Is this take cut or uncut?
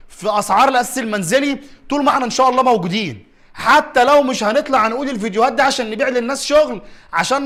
uncut